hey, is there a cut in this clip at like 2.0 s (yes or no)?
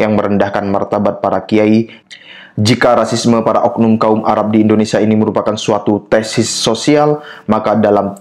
yes